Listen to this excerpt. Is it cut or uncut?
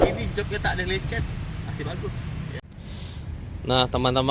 cut